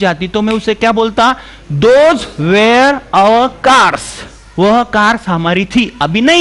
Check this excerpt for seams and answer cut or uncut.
uncut